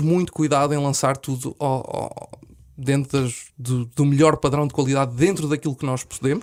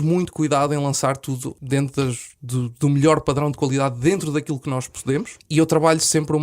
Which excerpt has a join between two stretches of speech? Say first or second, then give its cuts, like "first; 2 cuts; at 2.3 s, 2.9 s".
second; 2 cuts; at 1.5 s, 5.4 s